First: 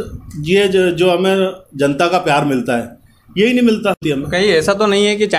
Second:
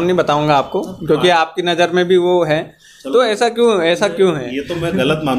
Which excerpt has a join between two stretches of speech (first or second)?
first